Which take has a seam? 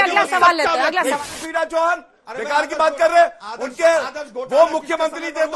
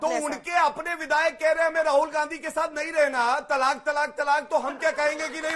first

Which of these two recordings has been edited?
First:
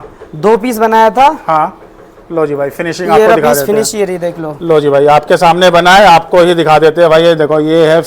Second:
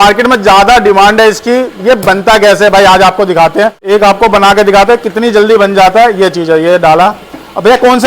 second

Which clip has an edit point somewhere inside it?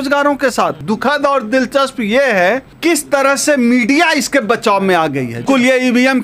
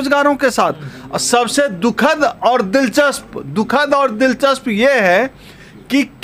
first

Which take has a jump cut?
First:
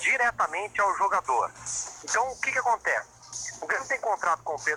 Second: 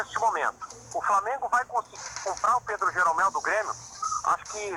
first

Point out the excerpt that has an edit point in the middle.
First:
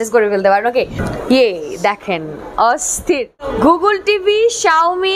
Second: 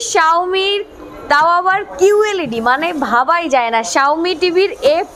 first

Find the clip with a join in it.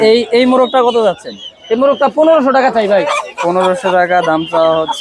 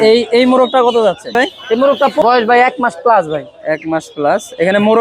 second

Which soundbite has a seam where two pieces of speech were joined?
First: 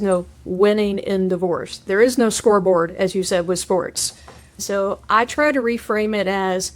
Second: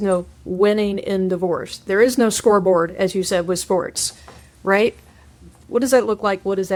first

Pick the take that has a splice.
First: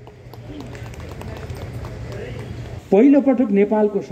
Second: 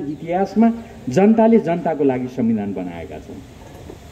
first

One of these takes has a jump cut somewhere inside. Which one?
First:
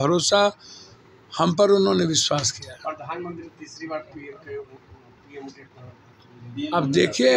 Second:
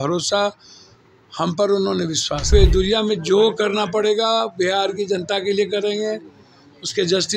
second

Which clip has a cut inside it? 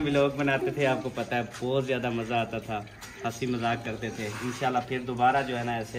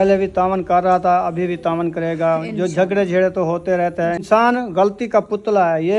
second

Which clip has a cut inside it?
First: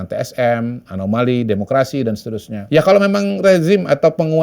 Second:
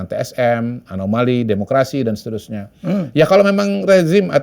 first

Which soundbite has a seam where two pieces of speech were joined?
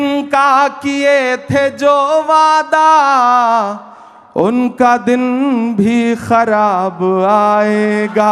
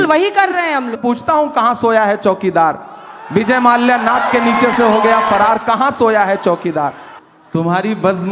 second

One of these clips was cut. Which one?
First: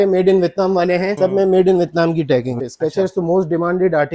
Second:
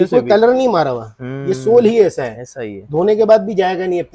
first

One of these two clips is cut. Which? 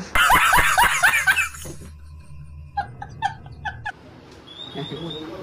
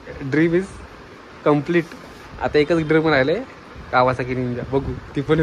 first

